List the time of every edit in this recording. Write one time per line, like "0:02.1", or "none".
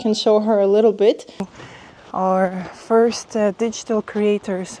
0:01.6